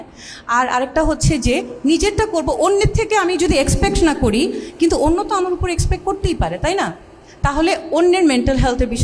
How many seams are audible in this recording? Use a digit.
0